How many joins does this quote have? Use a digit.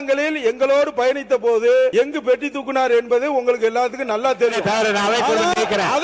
1